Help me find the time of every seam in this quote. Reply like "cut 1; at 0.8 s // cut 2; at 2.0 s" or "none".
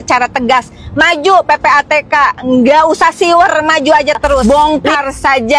cut 1; at 4.4 s